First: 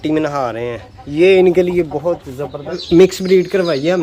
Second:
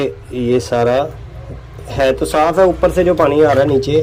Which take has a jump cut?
first; 1 cut; at 2.8 s

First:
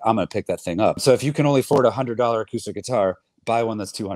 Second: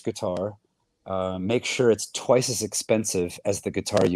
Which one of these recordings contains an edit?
first; 1 cut; at 1.0 s

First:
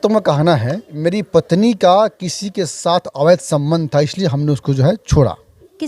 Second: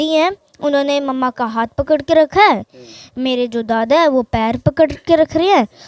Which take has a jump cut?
first; 1 cut; at 0.9 s

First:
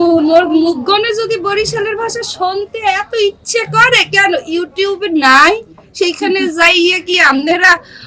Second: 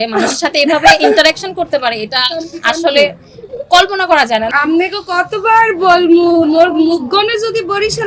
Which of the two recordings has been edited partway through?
second; 1 cut; at 4.5 s

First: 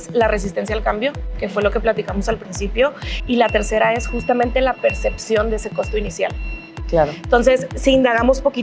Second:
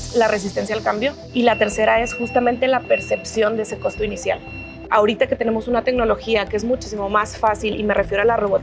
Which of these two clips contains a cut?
second; 2 cuts; at 1.2 s, 4.9 s

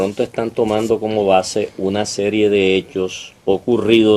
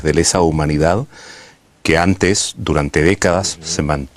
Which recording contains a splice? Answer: first; 1 cut; at 3.2 s

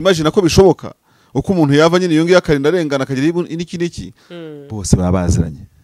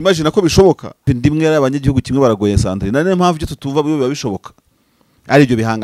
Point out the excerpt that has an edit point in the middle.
second; 1 cut; at 1.1 s

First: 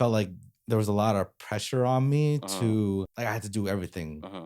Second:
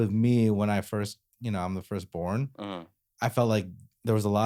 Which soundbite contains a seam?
first; 1 cut; at 3.1 s

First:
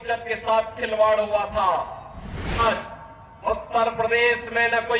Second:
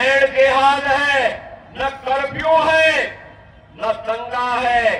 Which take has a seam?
first; 1 cut; at 2.6 s

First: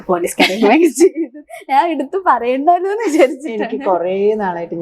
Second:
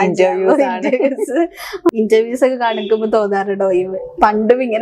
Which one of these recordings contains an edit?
second; 1 cut; at 1.9 s

